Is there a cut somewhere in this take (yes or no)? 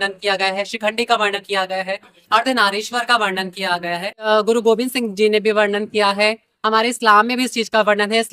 yes